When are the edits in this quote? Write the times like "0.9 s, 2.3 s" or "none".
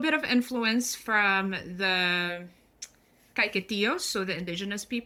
none